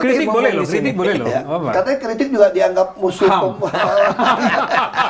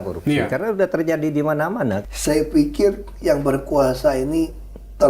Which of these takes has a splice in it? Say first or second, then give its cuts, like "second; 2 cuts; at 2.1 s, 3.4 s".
second; 1 cut; at 2.0 s